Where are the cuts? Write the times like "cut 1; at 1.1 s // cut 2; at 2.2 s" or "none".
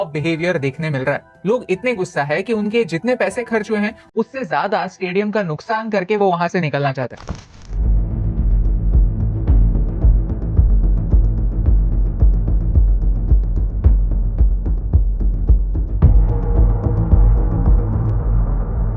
none